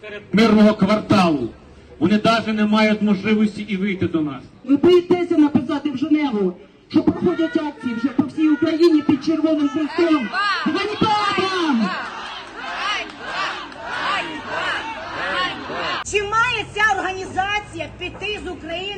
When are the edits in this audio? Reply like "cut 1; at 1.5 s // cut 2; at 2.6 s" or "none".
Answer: cut 1; at 4.6 s // cut 2; at 16.0 s